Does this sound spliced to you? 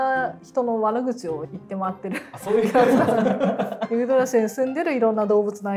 yes; 1 cut; at 3.8 s

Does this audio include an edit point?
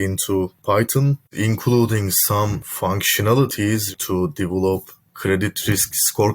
yes; 2 cuts; at 1.3 s, 3.9 s

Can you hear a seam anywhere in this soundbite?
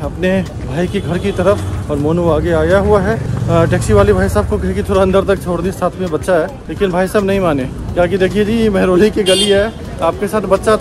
no; 0 cuts

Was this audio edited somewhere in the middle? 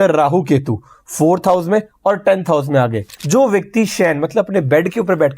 yes; 1 cut; at 3.2 s

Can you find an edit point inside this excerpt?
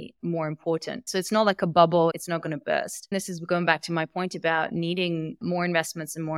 yes; 1 cut; at 3.1 s

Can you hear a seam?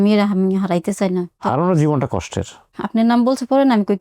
yes; 2 cuts; at 1.4 s, 2.6 s

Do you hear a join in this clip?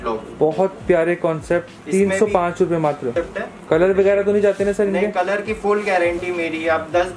yes; 1 cut; at 3.1 s

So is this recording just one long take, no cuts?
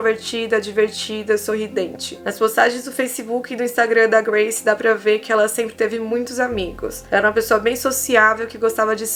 yes; 0 cuts

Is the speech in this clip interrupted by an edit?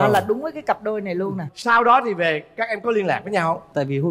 no; 0 cuts

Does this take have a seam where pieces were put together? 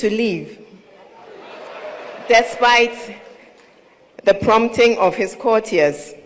no; 0 cuts

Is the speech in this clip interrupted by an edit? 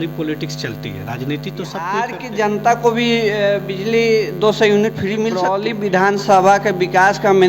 yes; 2 cuts; at 1.9 s, 5.5 s

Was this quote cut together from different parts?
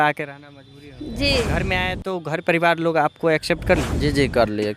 yes; 2 cuts; at 1.6 s, 3.9 s

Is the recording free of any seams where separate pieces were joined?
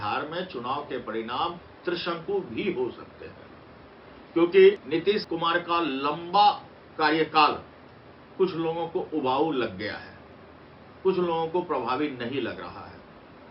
no; 1 cut; at 5.2 s

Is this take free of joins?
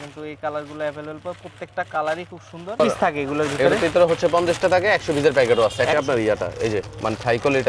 no; 2 cuts; at 2.8 s, 5.9 s

